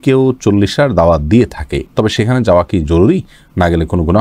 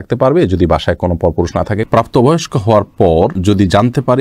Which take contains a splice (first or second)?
second